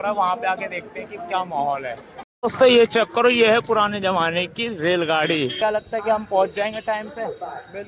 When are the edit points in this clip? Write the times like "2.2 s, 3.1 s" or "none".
2.3 s, 5.6 s